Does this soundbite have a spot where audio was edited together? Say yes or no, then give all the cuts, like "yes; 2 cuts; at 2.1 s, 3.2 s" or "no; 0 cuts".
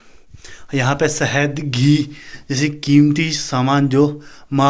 no; 0 cuts